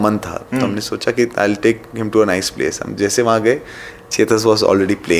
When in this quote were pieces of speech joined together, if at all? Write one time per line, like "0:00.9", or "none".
none